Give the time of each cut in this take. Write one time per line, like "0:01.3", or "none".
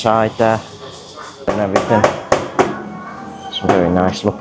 0:01.5